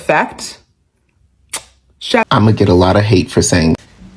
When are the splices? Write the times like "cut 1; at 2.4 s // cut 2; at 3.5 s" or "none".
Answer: cut 1; at 2.3 s

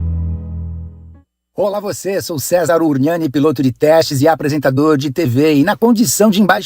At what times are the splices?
cut 1; at 1.4 s

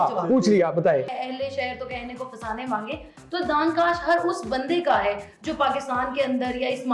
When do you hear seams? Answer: cut 1; at 1.1 s

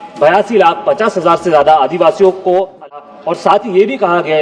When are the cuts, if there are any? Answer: cut 1; at 2.9 s

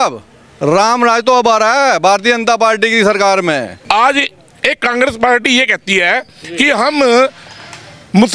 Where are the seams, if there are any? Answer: cut 1; at 3.7 s

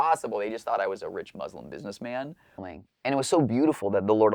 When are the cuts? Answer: cut 1; at 2.7 s

